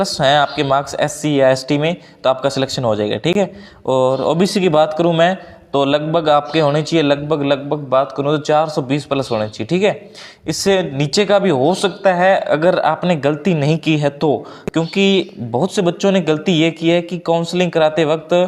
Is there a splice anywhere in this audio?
no; 0 cuts

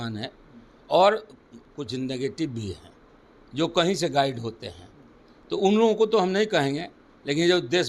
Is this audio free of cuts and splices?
yes; 0 cuts

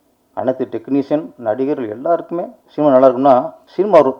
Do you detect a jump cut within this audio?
no; 0 cuts

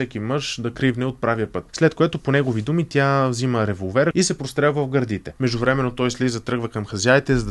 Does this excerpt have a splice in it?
yes; 3 cuts; at 1.6 s, 4.1 s, 5.2 s

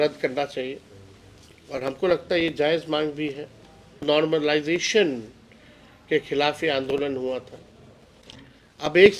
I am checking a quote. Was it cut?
yes; 1 cut; at 4.0 s

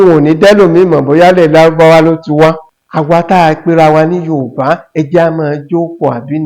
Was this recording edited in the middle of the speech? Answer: yes; 1 cut; at 2.6 s

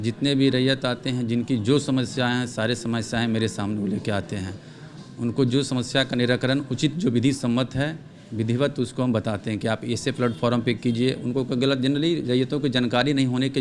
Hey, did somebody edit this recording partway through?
no; 0 cuts

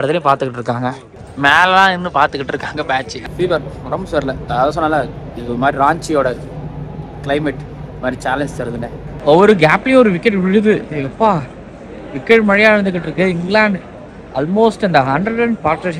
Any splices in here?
yes; 3 cuts; at 1.0 s, 3.1 s, 9.1 s

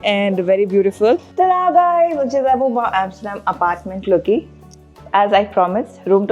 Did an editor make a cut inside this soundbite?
yes; 1 cut; at 1.3 s

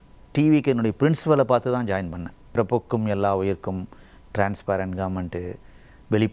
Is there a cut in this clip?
yes; 1 cut; at 2.5 s

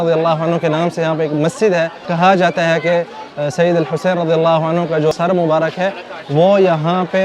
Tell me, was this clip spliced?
yes; 2 cuts; at 2.1 s, 5.1 s

